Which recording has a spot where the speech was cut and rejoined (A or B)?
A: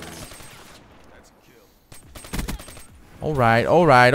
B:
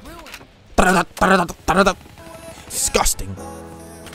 A